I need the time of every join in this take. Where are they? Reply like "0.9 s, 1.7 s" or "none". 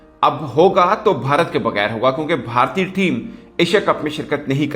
none